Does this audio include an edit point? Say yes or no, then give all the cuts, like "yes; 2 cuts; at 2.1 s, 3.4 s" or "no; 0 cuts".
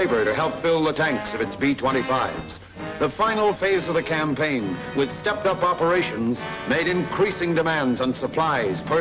no; 0 cuts